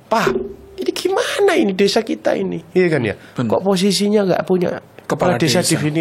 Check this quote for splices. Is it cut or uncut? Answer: uncut